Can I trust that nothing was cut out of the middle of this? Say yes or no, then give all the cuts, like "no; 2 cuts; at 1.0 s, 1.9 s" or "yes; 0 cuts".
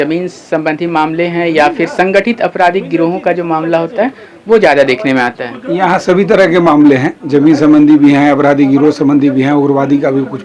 yes; 0 cuts